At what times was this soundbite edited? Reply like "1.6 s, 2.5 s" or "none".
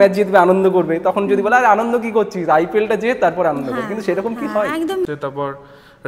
5.1 s